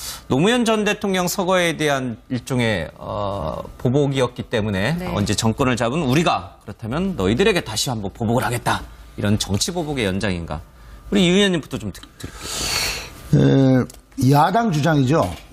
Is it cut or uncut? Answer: uncut